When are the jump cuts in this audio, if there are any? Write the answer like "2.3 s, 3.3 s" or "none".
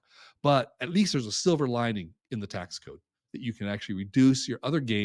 none